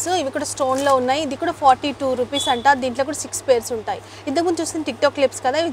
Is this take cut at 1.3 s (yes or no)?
no